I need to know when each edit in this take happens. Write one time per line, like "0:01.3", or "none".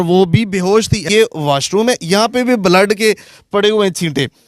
0:01.0